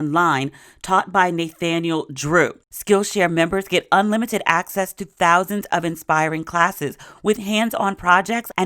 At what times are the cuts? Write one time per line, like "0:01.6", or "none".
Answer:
0:02.6